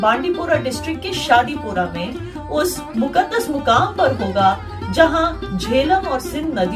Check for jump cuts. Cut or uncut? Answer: uncut